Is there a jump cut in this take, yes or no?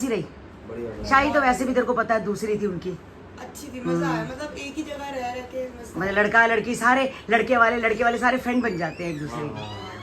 no